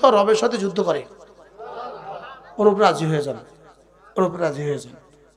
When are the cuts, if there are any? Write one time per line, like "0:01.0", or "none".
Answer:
none